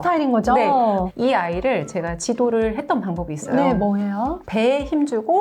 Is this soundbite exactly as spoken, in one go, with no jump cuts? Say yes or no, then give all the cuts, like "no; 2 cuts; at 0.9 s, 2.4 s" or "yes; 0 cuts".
no; 2 cuts; at 1.1 s, 4.4 s